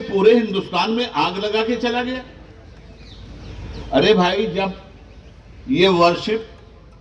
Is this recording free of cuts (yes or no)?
yes